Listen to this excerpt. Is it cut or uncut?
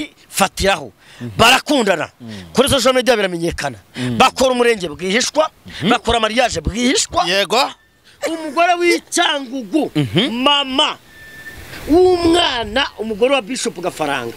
uncut